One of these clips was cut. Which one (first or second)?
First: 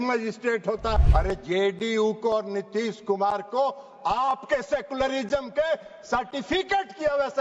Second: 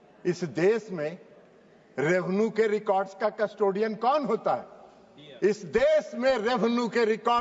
first